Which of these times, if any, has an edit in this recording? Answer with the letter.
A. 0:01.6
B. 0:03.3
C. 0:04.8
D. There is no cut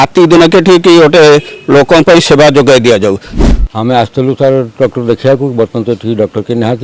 B